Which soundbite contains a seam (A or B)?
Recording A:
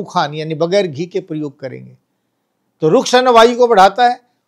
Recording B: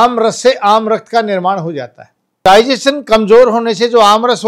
B